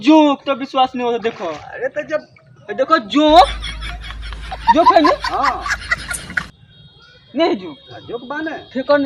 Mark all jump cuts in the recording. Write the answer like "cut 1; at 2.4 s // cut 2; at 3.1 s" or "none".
none